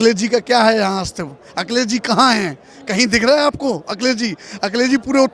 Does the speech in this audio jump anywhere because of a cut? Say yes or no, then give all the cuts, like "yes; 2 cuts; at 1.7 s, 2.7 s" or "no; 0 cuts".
no; 0 cuts